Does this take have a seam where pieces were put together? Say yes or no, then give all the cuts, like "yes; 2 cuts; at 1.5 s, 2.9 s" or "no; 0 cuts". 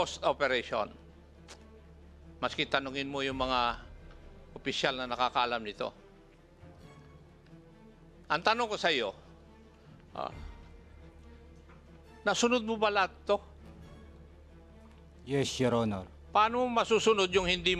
no; 0 cuts